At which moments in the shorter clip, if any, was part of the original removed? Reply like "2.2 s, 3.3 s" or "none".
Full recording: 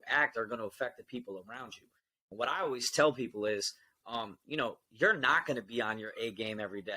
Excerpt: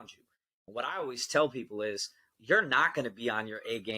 2.3 s